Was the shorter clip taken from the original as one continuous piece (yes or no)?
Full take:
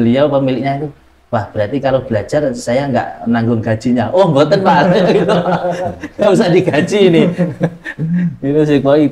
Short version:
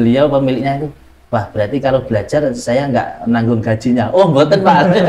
yes